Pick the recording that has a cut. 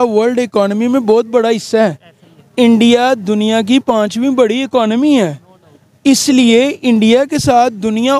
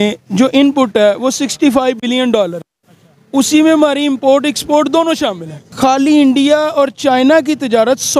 second; 1 cut; at 5.7 s

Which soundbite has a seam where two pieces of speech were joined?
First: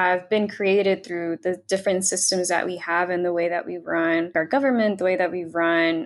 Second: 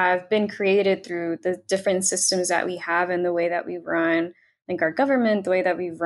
first; 1 cut; at 4.3 s

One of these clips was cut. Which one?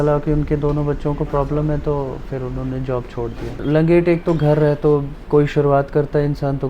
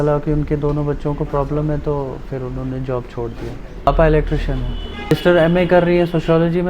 first; 1 cut; at 3.6 s

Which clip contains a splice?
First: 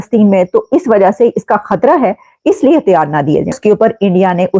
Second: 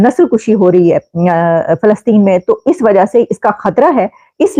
first; 1 cut; at 3.6 s

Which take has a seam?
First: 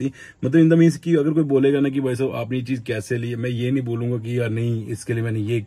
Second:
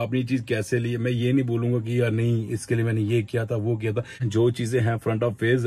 second; 1 cut; at 4.2 s

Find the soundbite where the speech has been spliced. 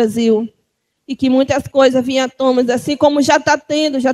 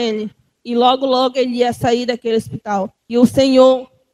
second; 1 cut; at 3.0 s

